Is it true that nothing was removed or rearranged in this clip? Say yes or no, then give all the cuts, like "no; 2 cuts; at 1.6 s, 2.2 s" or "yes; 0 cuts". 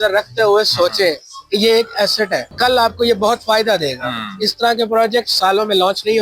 no; 1 cut; at 2.5 s